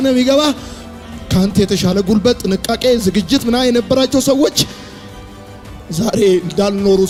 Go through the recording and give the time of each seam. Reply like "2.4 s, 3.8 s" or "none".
none